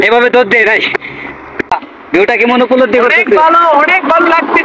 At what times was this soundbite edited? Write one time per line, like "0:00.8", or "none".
0:01.7